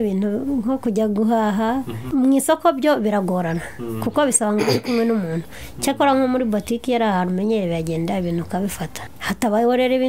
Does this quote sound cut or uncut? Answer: cut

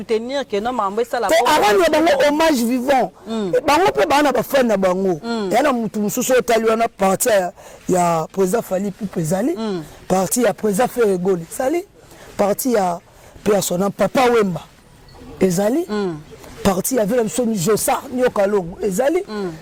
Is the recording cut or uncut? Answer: uncut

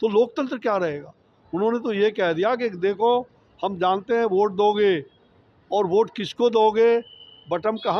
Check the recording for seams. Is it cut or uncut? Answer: uncut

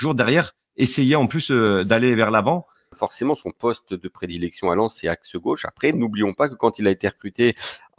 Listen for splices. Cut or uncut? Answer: cut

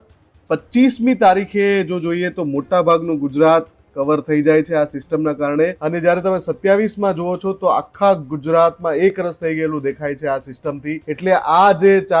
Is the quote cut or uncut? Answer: cut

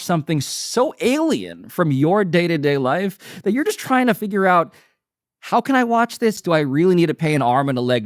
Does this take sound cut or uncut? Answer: cut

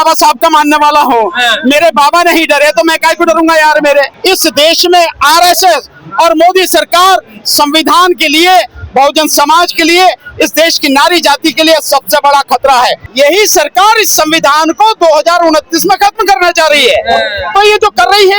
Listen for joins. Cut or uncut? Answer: cut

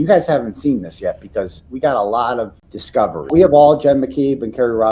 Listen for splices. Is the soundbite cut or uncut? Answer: uncut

